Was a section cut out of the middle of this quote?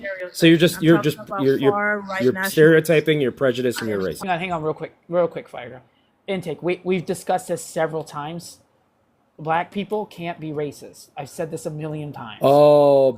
yes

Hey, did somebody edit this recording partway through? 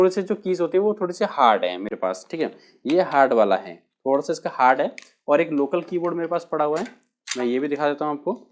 no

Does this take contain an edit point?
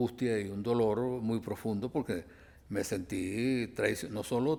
no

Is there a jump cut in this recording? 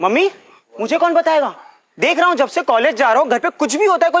no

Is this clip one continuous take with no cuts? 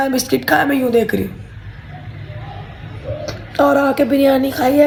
yes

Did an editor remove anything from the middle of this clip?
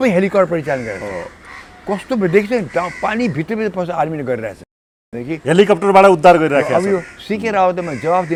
no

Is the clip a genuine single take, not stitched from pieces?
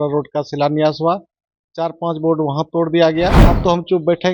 no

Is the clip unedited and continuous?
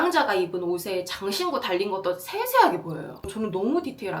no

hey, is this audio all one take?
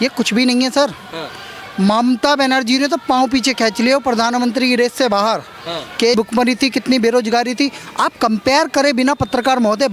no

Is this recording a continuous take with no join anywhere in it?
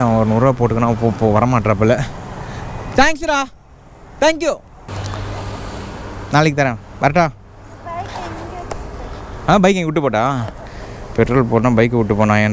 yes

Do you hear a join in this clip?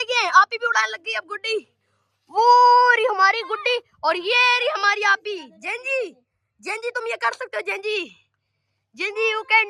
no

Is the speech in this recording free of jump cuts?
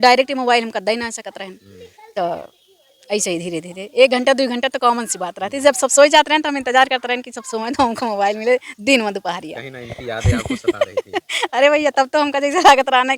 yes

